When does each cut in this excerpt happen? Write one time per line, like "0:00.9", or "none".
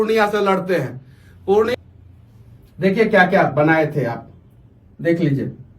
0:01.7